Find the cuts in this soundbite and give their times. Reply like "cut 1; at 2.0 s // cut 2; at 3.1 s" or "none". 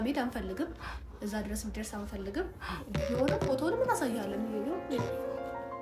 none